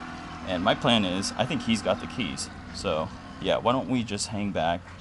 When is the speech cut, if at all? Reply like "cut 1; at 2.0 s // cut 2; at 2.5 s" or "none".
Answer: cut 1; at 3.2 s